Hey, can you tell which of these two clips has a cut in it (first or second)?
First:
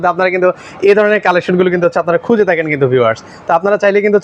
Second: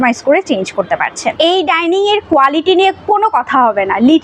second